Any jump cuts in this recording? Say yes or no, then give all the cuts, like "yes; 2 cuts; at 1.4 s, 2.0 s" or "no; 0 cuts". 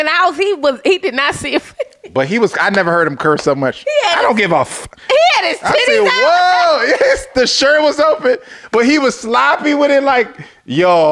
no; 0 cuts